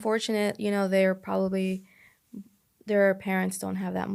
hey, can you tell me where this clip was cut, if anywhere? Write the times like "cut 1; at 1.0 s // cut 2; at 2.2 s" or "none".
none